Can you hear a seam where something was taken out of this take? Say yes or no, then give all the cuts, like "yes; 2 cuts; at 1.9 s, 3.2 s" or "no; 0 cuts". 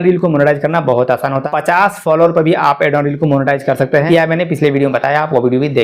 yes; 2 cuts; at 1.4 s, 4.1 s